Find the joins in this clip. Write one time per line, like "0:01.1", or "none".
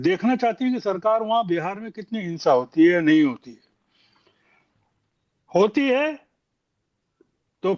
none

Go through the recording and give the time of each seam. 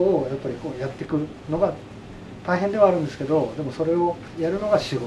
none

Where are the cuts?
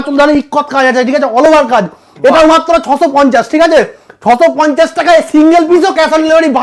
none

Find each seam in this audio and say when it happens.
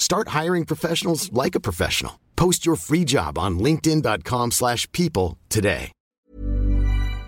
0:06.0

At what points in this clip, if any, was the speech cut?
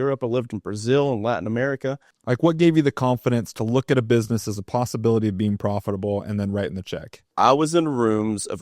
0:02.1
0:07.3

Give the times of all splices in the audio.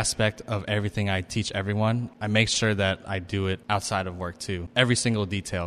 0:02.1
0:03.6
0:04.7

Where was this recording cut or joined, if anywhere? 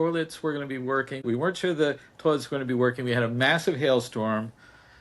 0:01.2

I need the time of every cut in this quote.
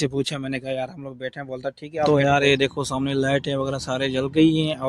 0:02.1

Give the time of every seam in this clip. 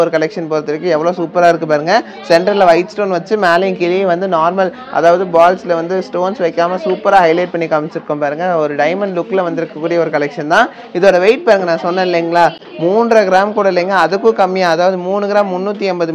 none

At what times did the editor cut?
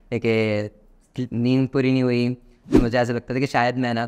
0:02.7

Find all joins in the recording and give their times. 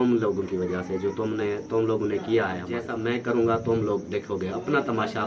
0:02.8

